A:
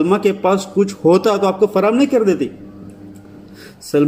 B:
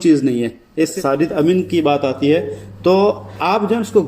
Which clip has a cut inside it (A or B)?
B